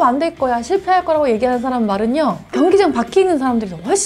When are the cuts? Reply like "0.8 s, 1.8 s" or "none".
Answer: none